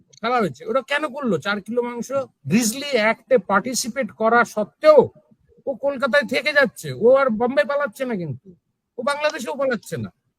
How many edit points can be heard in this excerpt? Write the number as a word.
one